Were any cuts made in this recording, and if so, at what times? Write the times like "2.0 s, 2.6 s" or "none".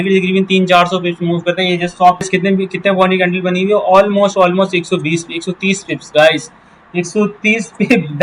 2.3 s